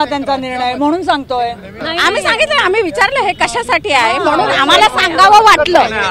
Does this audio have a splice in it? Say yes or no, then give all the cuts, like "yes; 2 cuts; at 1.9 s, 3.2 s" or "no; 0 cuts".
yes; 1 cut; at 1.7 s